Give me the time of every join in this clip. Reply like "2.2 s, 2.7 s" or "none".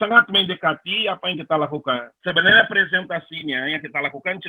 2.1 s